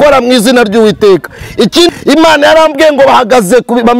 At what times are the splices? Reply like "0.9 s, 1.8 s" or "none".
1.9 s